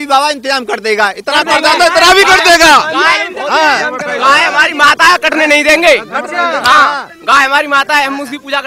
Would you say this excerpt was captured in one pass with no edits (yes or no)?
yes